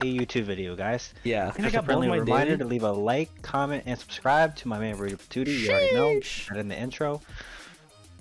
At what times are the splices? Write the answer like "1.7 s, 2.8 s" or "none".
1.6 s